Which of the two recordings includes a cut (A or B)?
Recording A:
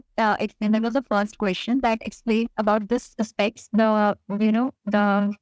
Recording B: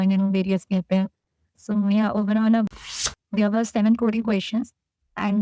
B